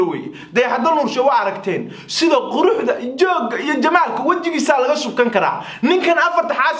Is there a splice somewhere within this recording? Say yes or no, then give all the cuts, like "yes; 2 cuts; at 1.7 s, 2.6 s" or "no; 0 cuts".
no; 0 cuts